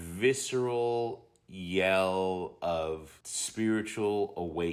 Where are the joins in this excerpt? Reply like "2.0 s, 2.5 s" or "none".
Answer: none